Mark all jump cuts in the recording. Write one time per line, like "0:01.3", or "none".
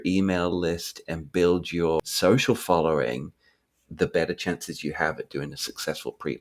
0:02.0